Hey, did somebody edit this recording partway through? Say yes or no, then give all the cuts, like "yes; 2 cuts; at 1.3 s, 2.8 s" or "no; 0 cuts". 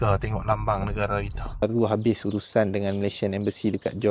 yes; 1 cut; at 1.6 s